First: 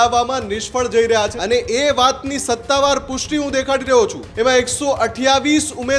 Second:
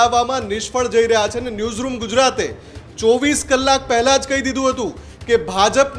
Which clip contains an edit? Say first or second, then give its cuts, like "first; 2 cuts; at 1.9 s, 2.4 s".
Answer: first; 2 cuts; at 1.4 s, 4.2 s